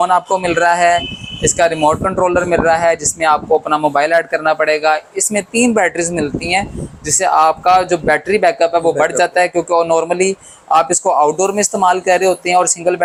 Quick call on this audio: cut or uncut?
uncut